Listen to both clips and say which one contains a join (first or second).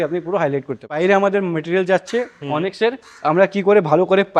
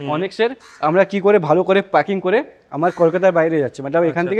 first